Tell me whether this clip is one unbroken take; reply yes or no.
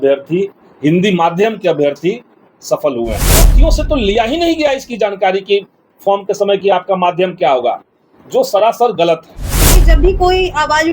no